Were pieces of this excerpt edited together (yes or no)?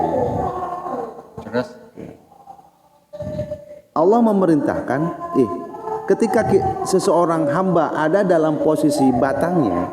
no